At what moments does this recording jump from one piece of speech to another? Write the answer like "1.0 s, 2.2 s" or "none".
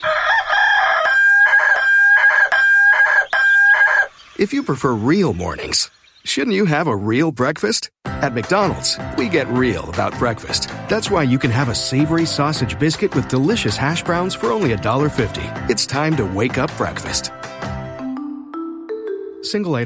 1.0 s